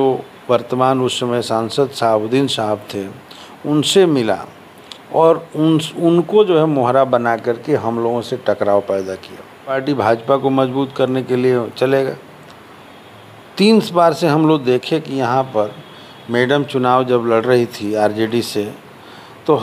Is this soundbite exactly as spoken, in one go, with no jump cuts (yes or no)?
no